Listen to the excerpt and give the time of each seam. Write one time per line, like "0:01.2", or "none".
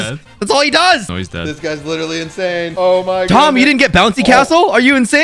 0:01.1

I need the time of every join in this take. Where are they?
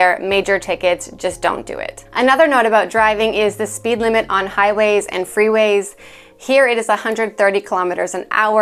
none

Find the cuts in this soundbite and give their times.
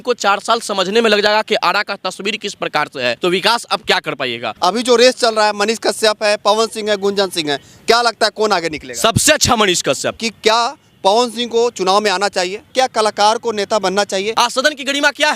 0:03.2
0:04.4
0:10.2
0:12.6
0:14.3

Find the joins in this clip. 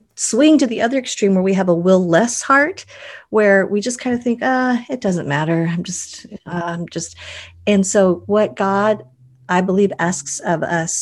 none

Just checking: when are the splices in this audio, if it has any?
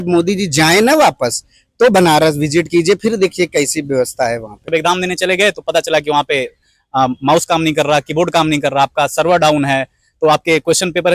0:04.7

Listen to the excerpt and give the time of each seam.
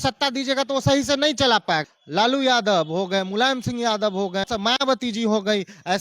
0:01.9
0:04.4

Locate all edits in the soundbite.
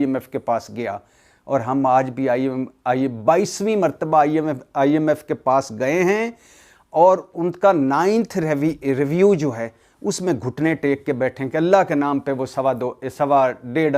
none

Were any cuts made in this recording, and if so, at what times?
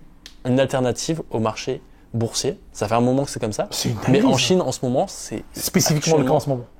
none

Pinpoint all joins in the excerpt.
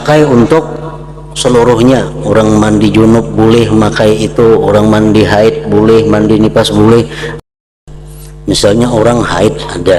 0:07.5

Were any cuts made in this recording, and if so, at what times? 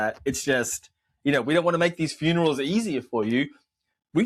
none

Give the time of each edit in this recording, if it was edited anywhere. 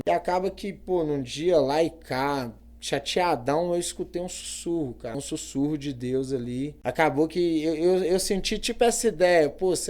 0:05.2
0:06.7

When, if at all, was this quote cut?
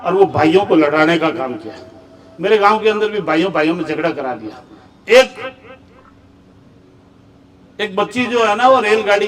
none

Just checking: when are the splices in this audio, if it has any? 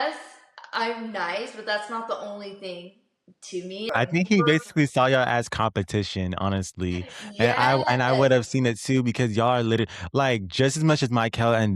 0:03.9

